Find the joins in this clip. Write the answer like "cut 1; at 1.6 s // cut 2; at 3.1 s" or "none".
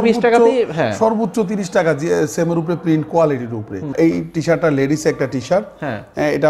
cut 1; at 3.9 s